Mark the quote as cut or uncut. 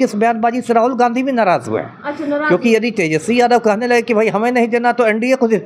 uncut